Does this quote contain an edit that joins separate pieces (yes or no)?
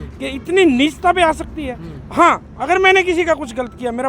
no